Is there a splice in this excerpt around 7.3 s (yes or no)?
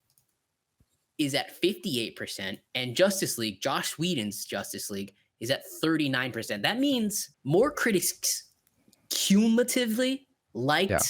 yes